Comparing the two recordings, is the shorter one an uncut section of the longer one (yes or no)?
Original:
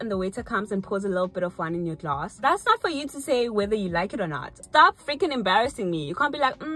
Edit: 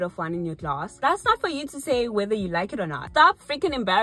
no